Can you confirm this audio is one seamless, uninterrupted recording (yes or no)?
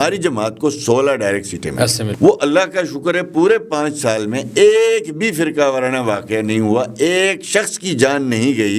no